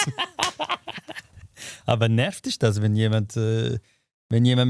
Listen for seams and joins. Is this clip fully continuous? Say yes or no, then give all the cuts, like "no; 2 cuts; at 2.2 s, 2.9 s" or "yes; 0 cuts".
yes; 0 cuts